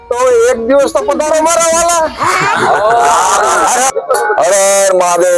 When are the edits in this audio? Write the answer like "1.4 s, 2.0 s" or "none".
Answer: 4.0 s